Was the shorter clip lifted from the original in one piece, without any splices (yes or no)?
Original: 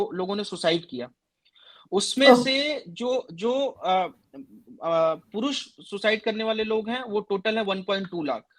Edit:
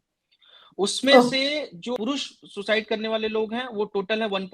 no